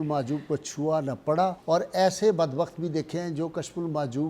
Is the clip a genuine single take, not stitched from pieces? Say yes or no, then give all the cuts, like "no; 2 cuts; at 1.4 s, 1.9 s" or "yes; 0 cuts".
no; 1 cut; at 1.6 s